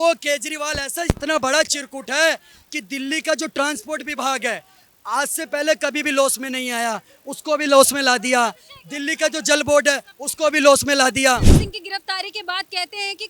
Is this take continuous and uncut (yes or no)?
no